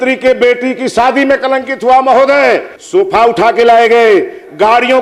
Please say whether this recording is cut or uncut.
cut